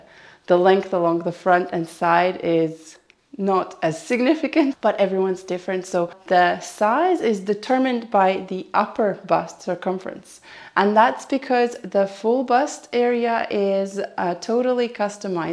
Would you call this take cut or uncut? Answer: cut